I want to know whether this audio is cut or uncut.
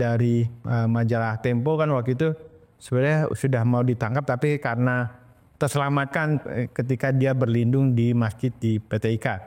uncut